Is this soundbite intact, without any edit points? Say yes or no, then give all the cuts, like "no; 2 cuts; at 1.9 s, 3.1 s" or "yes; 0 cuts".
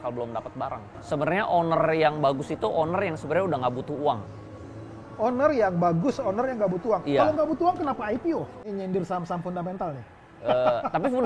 no; 2 cuts; at 0.9 s, 8.6 s